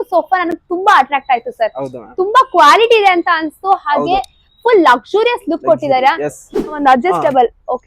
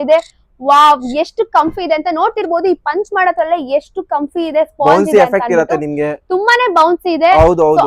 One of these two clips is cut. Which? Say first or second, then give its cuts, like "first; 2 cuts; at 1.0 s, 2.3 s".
first; 1 cut; at 6.7 s